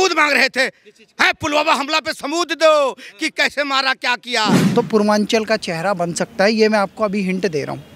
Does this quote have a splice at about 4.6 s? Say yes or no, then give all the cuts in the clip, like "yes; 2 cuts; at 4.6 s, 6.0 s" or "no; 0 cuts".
yes; 1 cut; at 4.6 s